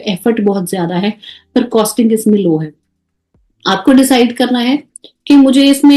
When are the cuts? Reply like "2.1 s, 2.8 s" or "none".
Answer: none